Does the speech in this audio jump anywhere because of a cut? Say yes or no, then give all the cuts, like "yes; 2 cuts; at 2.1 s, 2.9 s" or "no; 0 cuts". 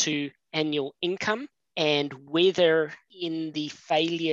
yes; 2 cuts; at 1.6 s, 3.1 s